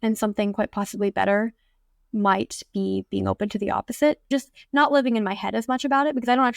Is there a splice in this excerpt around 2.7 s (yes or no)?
no